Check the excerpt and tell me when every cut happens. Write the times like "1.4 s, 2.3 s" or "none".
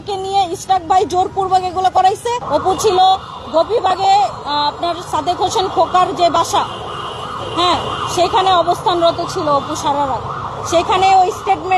2.4 s

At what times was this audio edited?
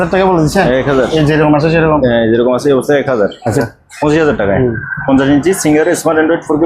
3.6 s

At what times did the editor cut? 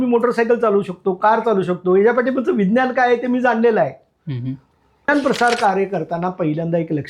5.1 s

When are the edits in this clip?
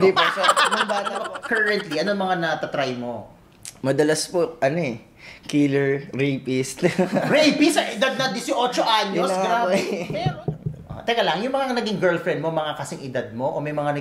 1.3 s, 10.1 s

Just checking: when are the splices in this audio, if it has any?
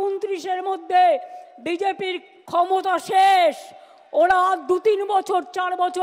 2.3 s

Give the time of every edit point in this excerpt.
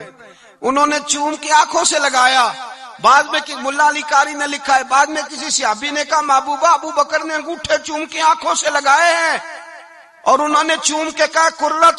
none

